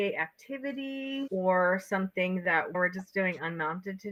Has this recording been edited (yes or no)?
no